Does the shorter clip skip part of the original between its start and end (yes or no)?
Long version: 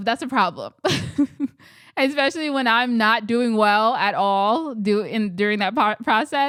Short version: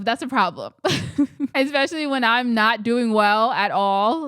yes